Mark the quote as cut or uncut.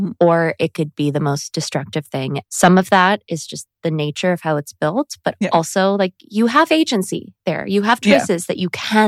cut